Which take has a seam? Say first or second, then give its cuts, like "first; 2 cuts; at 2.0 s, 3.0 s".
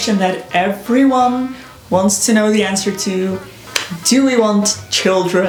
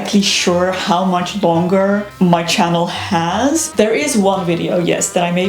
second; 2 cuts; at 2.1 s, 3.7 s